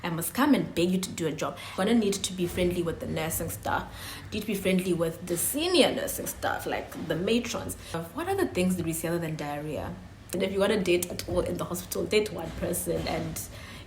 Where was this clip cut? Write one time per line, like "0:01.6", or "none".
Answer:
0:01.8
0:08.0
0:10.3